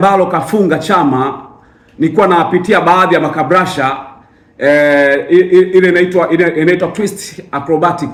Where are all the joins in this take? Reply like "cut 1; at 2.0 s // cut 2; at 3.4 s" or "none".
none